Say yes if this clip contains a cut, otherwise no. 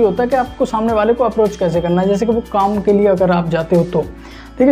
no